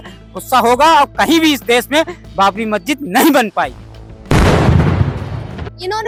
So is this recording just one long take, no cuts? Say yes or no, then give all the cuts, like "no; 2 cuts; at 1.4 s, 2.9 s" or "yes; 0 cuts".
yes; 0 cuts